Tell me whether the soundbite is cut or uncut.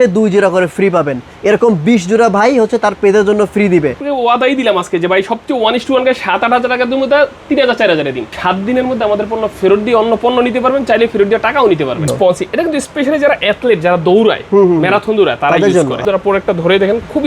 cut